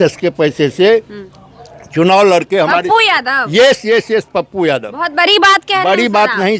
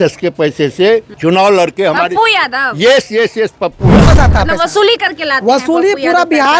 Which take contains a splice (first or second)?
second